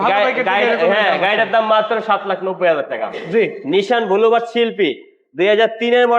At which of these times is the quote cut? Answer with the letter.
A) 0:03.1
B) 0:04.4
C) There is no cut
A